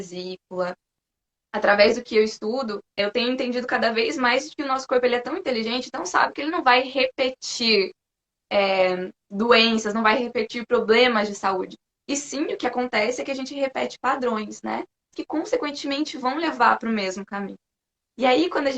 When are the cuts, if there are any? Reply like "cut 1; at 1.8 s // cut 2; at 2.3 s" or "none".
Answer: cut 1; at 1.1 s // cut 2; at 3.0 s // cut 3; at 15.1 s